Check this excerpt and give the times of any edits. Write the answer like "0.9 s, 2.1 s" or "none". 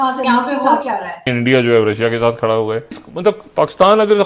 1.3 s, 3.0 s